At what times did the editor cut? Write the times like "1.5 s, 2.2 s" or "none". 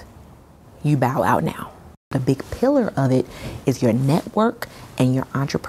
2.1 s